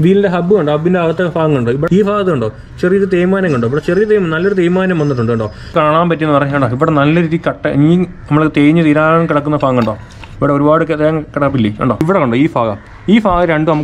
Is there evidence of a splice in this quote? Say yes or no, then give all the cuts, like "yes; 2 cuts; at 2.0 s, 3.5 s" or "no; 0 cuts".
yes; 3 cuts; at 1.8 s, 5.7 s, 12.0 s